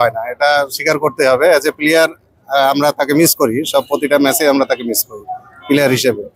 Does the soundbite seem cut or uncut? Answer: uncut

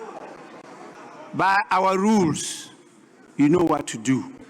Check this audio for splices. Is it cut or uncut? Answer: cut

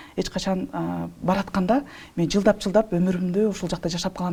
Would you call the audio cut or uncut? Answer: uncut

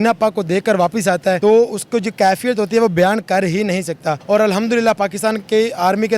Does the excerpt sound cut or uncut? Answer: cut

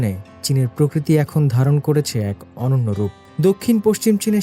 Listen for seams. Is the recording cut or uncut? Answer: uncut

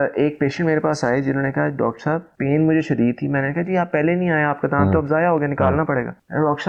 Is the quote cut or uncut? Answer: uncut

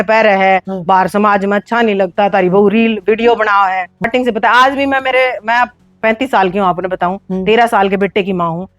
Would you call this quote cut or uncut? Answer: cut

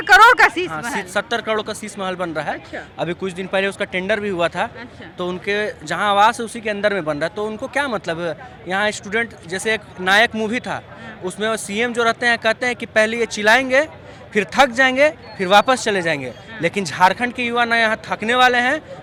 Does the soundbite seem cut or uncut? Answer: uncut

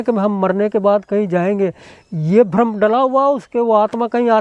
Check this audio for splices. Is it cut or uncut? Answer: uncut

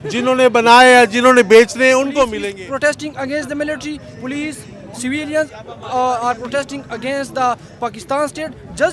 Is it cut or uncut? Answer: cut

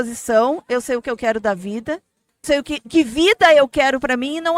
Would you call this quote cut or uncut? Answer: cut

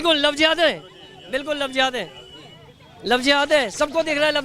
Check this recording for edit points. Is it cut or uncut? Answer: uncut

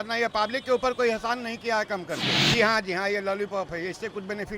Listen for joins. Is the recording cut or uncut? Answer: cut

